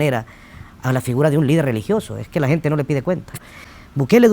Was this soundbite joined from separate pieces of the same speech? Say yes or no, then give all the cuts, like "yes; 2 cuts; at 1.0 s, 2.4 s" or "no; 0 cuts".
yes; 1 cut; at 3.3 s